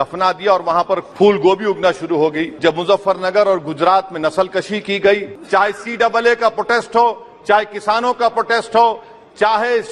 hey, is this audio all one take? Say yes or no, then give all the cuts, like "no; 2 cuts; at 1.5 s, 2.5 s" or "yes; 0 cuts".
no; 3 cuts; at 1.1 s, 2.5 s, 5.3 s